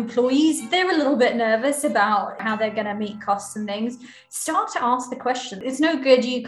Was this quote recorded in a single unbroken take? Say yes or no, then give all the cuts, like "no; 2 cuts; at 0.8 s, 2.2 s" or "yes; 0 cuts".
yes; 0 cuts